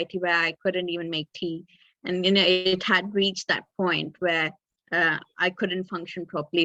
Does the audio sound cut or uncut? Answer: uncut